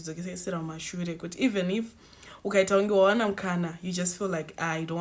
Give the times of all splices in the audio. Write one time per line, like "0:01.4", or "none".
none